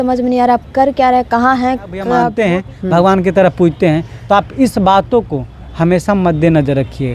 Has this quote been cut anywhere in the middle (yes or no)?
yes